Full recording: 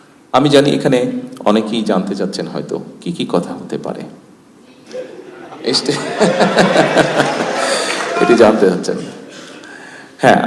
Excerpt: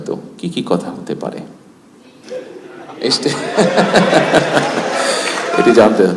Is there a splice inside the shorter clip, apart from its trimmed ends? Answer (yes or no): no